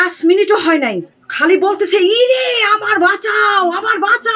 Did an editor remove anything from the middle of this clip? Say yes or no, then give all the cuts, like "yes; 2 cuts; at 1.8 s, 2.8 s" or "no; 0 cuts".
no; 0 cuts